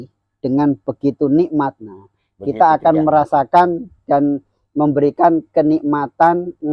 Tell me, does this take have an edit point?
no; 0 cuts

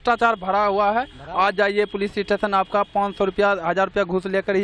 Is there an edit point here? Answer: no; 0 cuts

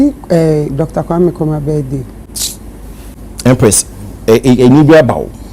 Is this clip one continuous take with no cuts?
no; 1 cut; at 3.1 s

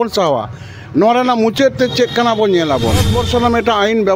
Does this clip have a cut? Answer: yes; 1 cut; at 3.2 s

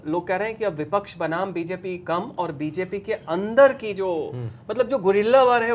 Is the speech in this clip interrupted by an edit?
no; 0 cuts

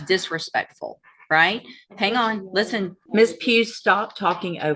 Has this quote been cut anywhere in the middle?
yes; 1 cut; at 3.0 s

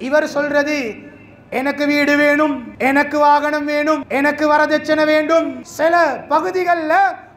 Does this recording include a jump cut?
yes; 3 cuts; at 2.7 s, 4.0 s, 5.6 s

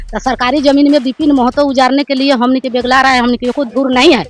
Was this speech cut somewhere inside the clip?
no; 0 cuts

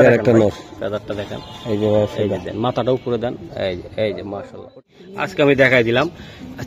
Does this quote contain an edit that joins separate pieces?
yes; 1 cut; at 4.7 s

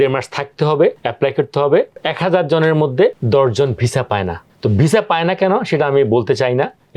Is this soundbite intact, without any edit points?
yes; 0 cuts

